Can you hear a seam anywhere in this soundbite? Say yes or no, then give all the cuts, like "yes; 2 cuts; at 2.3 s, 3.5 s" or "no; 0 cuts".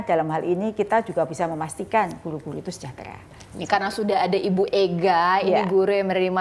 no; 0 cuts